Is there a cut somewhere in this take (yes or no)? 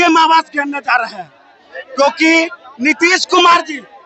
no